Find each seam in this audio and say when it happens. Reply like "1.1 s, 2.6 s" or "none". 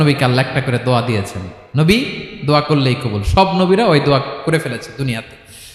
none